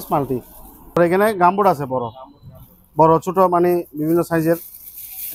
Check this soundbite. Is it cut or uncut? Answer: cut